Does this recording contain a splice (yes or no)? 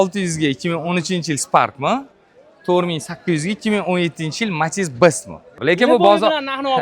yes